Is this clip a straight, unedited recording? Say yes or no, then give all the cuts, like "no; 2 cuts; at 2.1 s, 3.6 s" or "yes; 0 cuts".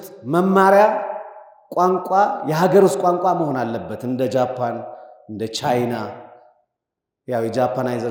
yes; 0 cuts